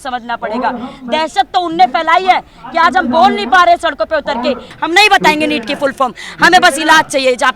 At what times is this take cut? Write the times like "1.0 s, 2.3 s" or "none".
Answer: 4.7 s